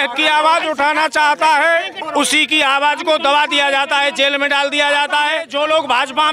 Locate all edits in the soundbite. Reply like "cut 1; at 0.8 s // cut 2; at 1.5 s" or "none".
cut 1; at 2.0 s // cut 2; at 5.5 s